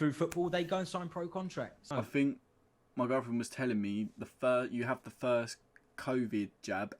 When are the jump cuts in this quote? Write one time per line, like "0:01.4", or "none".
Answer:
0:01.9